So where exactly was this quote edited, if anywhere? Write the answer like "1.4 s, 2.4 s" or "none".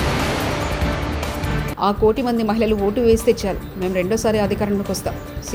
none